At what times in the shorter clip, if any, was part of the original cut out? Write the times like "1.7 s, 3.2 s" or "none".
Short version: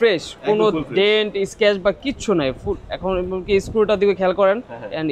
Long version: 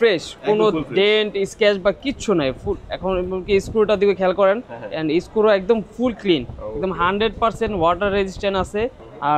none